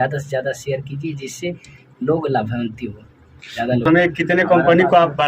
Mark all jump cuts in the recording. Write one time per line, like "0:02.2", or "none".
0:03.8